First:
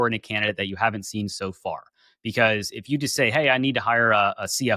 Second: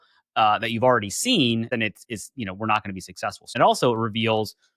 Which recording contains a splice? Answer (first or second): second